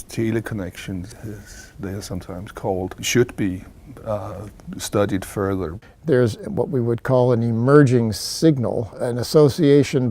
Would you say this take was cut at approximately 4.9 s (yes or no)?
yes